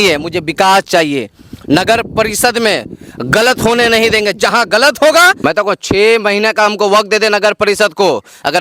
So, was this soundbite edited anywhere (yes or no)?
yes